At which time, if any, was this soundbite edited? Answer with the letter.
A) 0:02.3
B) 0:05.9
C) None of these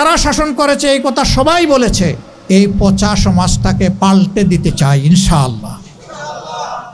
A